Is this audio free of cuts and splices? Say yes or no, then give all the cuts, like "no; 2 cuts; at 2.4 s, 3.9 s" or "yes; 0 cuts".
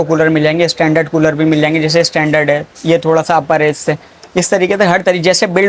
yes; 0 cuts